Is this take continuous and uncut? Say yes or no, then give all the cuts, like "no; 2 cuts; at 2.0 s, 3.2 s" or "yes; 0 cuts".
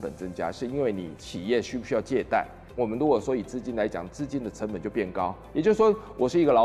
yes; 0 cuts